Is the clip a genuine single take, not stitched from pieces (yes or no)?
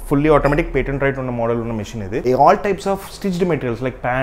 no